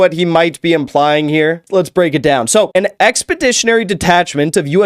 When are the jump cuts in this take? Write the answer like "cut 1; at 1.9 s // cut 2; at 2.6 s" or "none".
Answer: cut 1; at 1.6 s // cut 2; at 2.8 s